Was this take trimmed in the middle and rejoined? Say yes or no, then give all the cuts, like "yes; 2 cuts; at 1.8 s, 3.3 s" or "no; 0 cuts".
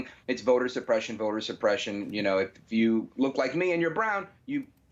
no; 0 cuts